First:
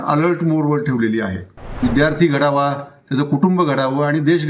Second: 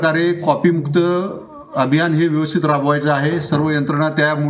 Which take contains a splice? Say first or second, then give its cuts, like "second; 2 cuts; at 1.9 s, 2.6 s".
first; 1 cut; at 1.8 s